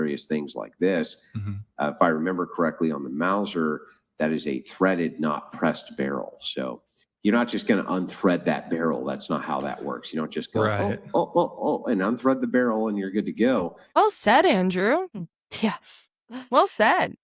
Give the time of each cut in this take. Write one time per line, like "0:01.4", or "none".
0:13.8